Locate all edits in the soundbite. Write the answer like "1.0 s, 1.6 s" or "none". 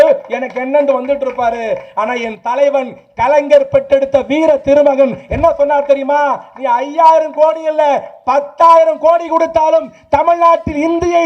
none